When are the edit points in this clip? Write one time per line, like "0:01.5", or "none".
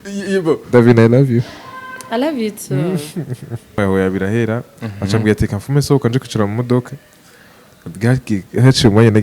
0:03.7